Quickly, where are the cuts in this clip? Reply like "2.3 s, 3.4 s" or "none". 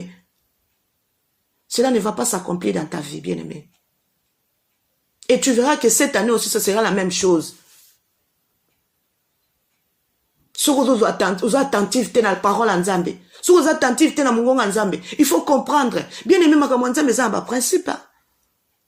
none